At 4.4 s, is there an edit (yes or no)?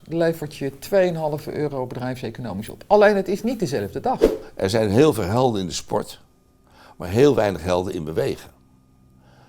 yes